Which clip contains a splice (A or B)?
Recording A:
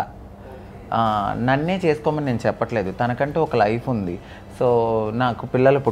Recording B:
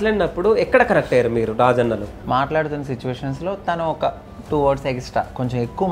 B